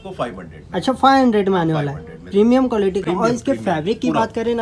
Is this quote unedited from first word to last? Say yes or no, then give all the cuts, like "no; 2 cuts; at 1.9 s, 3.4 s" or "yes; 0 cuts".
yes; 0 cuts